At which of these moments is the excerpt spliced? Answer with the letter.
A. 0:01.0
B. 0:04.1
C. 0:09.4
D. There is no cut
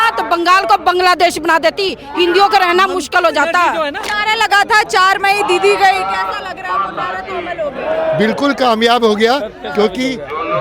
B